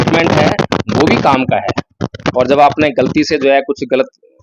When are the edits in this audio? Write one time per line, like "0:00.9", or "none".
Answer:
0:02.0

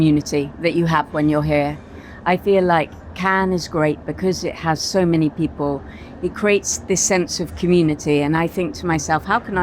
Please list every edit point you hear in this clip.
none

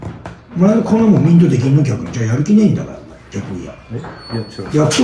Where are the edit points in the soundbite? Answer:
none

